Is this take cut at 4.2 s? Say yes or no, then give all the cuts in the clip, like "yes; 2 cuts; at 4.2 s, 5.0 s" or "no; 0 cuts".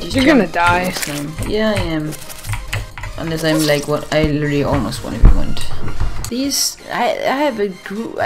no; 1 cut; at 6.2 s